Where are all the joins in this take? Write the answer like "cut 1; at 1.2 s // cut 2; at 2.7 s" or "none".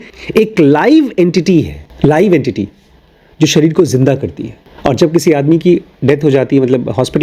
cut 1; at 1.8 s